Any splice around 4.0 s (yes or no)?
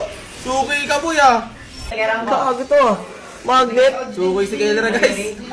no